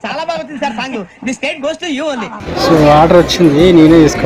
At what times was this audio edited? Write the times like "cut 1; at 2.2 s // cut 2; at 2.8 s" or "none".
cut 1; at 2.4 s

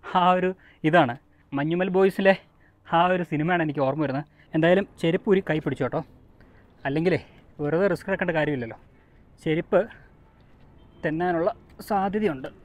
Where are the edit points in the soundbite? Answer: cut 1; at 4.4 s

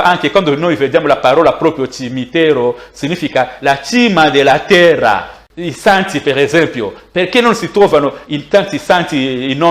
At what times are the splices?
cut 1; at 5.4 s

